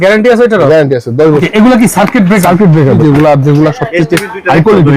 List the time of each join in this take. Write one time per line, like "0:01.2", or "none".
0:01.5
0:03.0

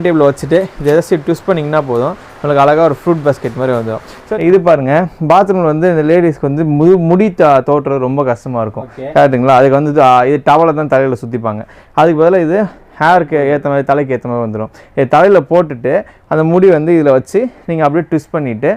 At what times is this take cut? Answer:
0:04.2

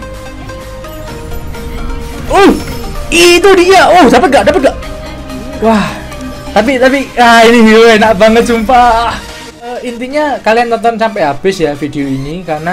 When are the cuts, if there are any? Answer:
0:09.8

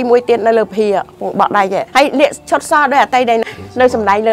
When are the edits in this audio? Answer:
0:01.9
0:03.4

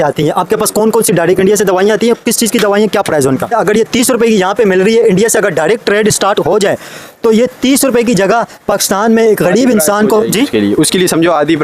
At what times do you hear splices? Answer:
0:03.5

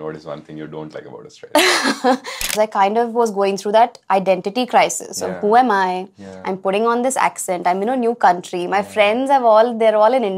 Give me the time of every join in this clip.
0:02.5

